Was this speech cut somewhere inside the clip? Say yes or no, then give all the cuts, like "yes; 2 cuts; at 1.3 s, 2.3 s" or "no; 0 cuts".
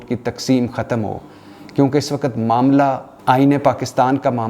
yes; 1 cut; at 3.1 s